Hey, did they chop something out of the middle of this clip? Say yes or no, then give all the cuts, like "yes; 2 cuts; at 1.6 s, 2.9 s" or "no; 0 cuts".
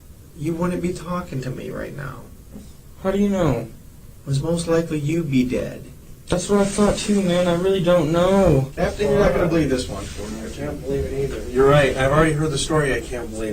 yes; 1 cut; at 8.7 s